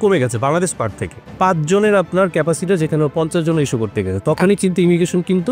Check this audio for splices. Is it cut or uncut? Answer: cut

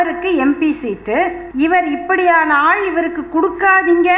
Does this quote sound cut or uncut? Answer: cut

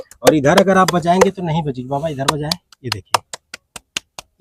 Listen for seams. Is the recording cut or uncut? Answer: uncut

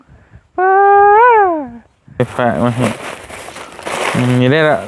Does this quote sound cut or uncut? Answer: cut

